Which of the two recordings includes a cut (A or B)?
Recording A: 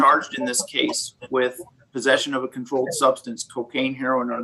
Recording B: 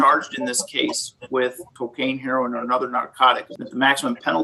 B